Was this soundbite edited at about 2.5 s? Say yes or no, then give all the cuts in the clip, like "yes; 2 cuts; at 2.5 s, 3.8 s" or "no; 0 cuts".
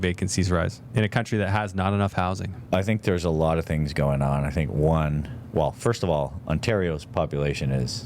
yes; 2 cuts; at 0.8 s, 2.5 s